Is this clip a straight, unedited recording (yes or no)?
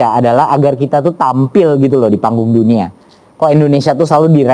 yes